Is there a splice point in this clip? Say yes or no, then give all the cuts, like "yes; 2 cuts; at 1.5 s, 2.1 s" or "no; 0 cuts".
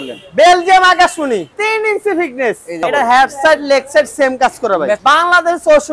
yes; 3 cuts; at 1.5 s, 2.8 s, 5.0 s